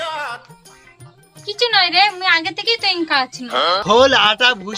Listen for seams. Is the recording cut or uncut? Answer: cut